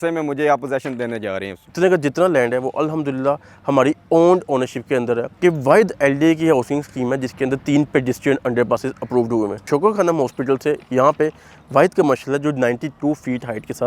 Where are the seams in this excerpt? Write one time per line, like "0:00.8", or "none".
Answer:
0:01.7
0:05.3
0:09.7